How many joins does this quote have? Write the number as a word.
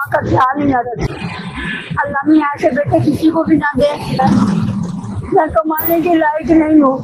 two